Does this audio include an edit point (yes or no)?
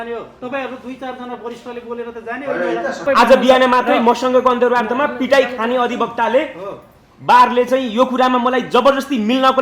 yes